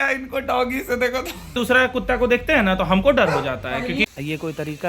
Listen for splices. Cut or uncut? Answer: cut